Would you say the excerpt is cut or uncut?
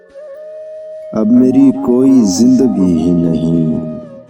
cut